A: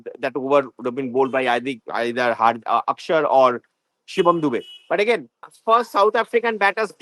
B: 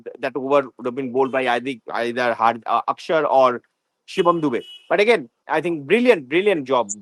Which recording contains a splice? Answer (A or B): A